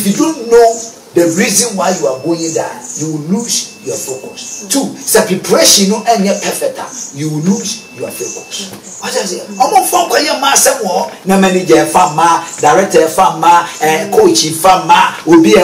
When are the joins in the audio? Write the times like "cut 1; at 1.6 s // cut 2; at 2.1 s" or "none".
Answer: cut 1; at 8.9 s